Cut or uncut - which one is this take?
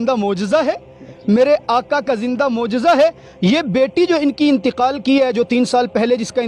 uncut